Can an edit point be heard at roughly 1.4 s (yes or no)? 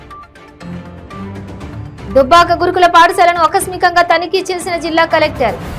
no